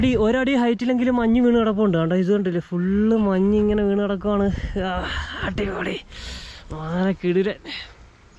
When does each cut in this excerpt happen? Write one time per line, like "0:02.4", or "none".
none